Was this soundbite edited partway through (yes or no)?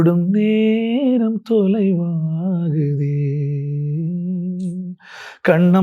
no